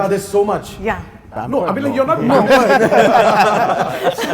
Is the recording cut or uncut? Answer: uncut